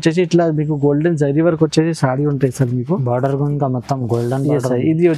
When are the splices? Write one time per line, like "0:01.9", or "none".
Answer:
none